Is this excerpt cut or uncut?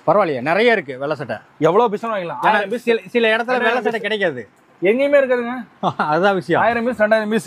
uncut